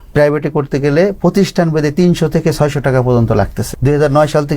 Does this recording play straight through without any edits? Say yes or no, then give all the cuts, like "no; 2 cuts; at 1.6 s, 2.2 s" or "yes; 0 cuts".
no; 1 cut; at 3.7 s